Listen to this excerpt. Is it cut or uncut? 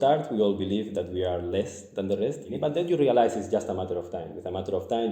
cut